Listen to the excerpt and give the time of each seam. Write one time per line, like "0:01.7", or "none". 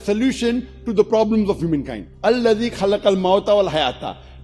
0:02.1